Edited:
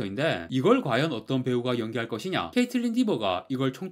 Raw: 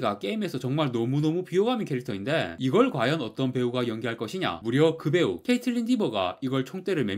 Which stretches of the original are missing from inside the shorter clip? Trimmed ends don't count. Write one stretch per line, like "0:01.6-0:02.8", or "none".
0:04.6-0:05.4